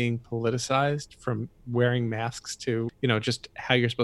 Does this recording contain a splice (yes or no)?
yes